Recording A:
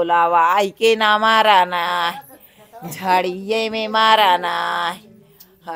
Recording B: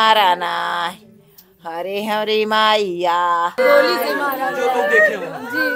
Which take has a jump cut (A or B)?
B